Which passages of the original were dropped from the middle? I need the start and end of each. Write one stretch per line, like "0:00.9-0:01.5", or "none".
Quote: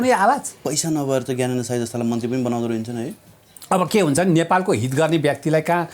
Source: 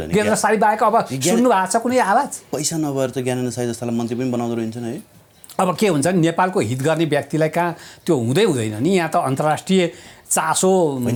none